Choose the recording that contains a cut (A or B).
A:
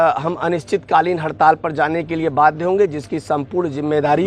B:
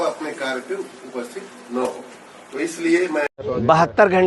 B